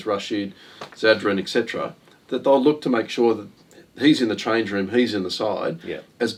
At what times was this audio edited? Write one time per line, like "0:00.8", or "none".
none